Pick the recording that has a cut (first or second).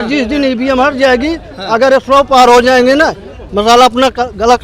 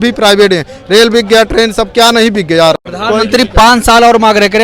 second